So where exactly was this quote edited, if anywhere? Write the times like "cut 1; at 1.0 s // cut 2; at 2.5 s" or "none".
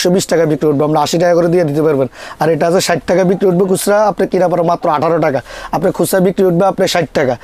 none